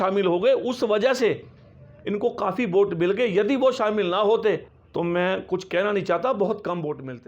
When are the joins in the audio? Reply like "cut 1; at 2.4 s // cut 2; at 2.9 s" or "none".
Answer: cut 1; at 4.8 s